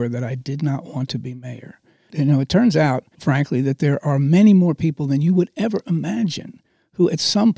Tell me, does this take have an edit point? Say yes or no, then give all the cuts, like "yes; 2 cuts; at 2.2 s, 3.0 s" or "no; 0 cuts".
yes; 2 cuts; at 2.1 s, 3.1 s